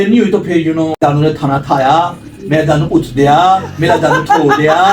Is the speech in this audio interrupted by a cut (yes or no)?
yes